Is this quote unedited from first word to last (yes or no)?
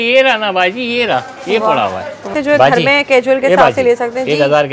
no